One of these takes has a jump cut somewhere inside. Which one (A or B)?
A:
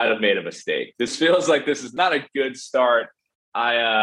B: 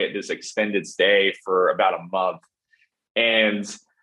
A